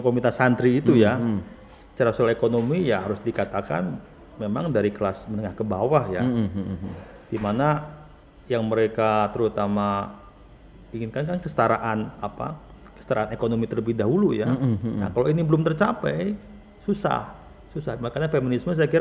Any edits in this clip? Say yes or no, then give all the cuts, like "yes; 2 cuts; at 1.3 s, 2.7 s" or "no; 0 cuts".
no; 0 cuts